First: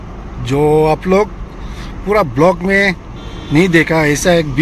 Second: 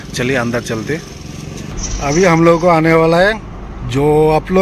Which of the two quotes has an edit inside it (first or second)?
second